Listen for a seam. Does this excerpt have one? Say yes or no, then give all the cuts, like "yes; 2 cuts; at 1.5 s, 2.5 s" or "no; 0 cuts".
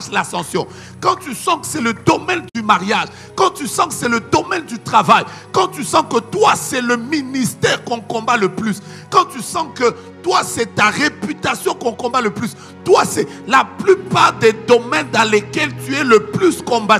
no; 0 cuts